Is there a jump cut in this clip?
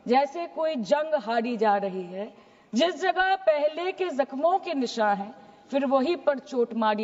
no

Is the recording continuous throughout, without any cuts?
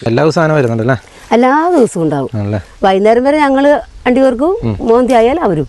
yes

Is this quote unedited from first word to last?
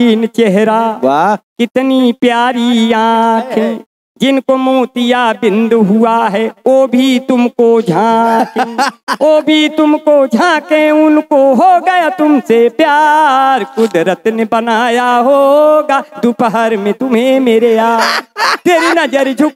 yes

